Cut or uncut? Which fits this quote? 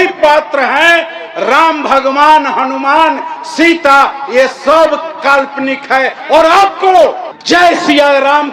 uncut